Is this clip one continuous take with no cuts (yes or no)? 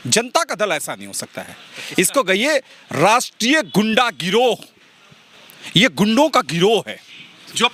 yes